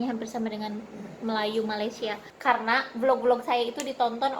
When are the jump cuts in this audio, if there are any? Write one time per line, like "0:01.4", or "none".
0:02.3